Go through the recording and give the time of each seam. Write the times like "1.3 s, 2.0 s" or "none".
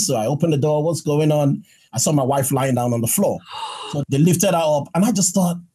1.8 s, 3.9 s

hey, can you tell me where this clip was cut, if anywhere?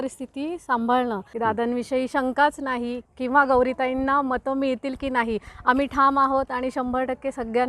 1.3 s, 3.0 s

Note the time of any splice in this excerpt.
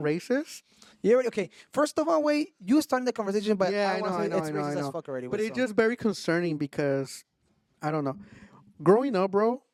none

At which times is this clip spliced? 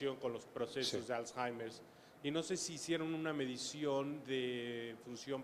4.2 s

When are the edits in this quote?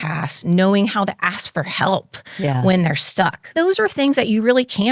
3.6 s

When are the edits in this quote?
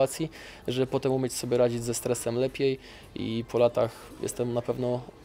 none

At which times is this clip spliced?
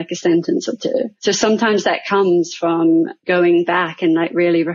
1.1 s, 3.2 s

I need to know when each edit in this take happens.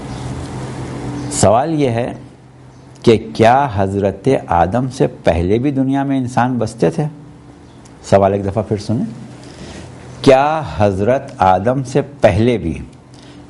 1.1 s

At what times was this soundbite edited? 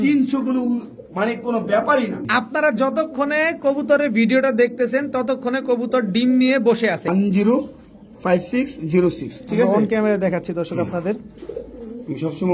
2.2 s, 7.1 s

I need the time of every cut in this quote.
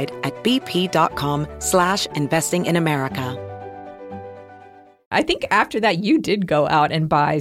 5.1 s

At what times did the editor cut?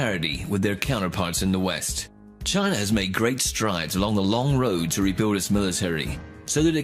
1.7 s

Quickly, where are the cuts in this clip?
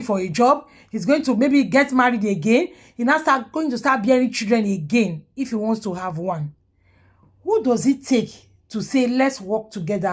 none

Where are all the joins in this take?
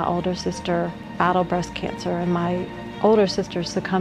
1.0 s

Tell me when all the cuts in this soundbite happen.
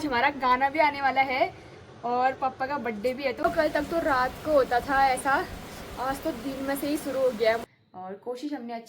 3.4 s, 7.6 s

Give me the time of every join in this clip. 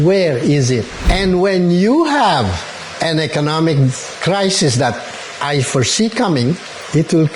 1.0 s

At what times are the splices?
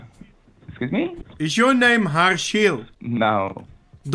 1.2 s, 2.9 s

